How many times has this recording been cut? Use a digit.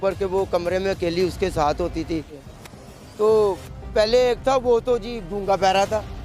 1